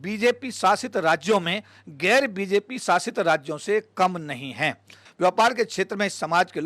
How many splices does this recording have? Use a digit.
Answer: 1